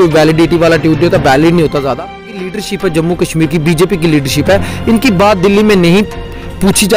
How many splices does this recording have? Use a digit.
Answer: 1